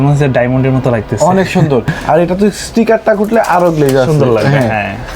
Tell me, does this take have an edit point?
no; 0 cuts

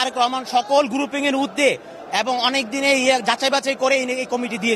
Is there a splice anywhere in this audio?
no; 0 cuts

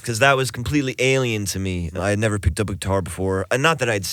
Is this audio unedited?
no; 1 cut; at 1.9 s

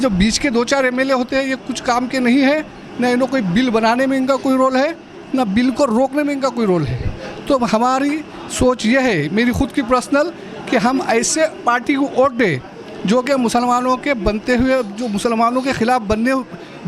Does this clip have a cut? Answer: no; 0 cuts

